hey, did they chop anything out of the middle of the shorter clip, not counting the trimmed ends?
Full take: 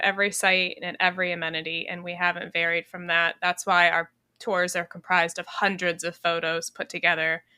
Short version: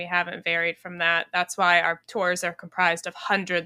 yes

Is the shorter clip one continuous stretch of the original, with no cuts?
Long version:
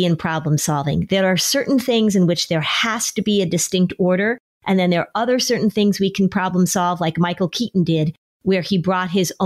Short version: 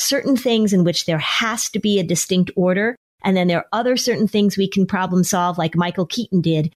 yes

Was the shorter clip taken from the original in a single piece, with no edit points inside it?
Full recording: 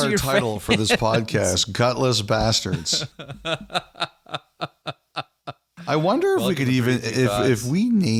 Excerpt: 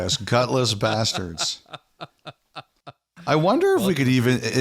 no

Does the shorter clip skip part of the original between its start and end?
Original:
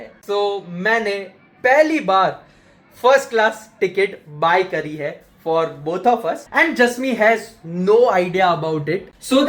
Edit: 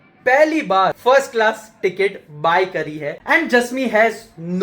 yes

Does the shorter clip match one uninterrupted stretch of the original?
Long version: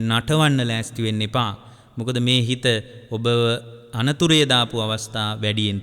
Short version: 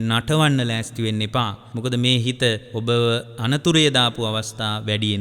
no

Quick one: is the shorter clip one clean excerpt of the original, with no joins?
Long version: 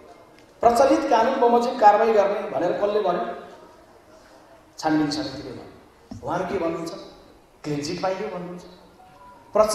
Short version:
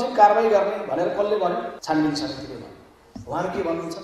no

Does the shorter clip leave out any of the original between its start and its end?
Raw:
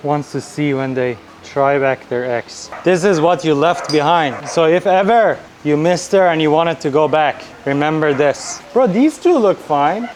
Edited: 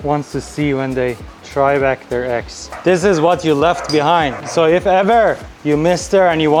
no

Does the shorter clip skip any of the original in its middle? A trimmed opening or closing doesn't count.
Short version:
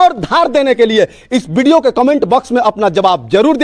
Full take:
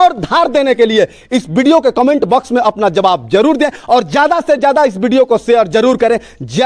no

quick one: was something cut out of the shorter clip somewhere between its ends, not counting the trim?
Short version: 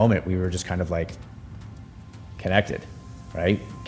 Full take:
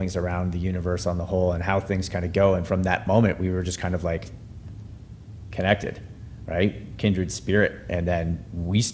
no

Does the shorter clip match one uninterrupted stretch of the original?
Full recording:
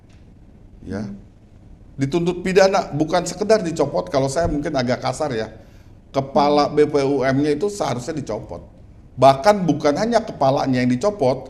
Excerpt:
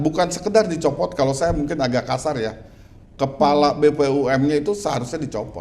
yes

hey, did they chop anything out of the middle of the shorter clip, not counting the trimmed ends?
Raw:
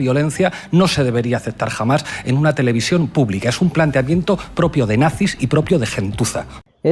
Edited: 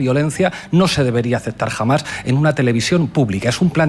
no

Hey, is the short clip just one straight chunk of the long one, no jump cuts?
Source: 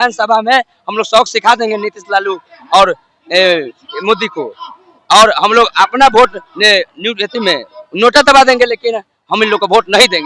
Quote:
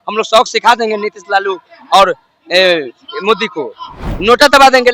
no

